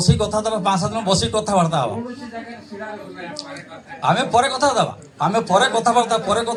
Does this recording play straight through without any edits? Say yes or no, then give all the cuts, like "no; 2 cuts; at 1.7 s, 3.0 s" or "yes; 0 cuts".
yes; 0 cuts